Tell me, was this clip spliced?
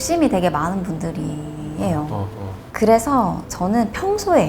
yes; 2 cuts; at 2.6 s, 3.5 s

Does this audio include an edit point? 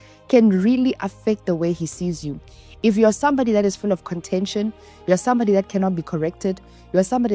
no; 0 cuts

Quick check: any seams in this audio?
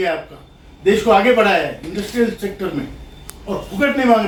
no; 0 cuts

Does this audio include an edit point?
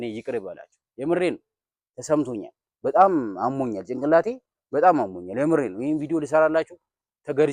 no; 0 cuts

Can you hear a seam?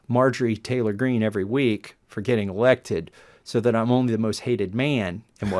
no; 0 cuts

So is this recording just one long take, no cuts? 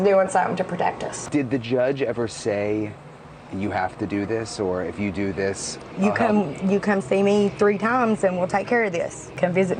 no; 1 cut; at 1.1 s

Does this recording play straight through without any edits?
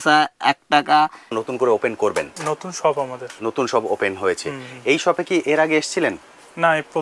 no; 1 cut; at 1.3 s

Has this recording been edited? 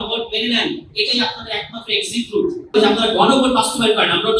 yes; 1 cut; at 2.7 s

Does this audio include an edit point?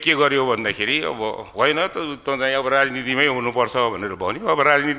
no; 0 cuts

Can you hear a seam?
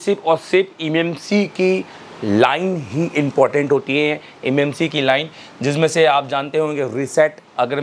no; 0 cuts

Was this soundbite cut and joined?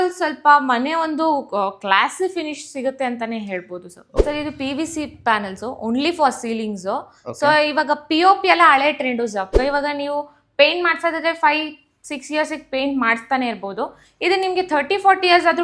yes; 2 cuts; at 4.1 s, 9.5 s

